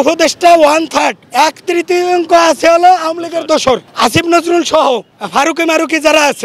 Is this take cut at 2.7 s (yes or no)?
no